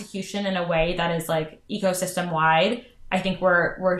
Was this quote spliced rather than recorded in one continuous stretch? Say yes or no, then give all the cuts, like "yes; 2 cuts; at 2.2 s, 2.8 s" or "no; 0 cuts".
no; 0 cuts